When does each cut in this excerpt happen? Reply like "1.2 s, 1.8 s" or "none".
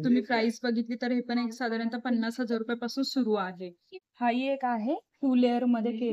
4.0 s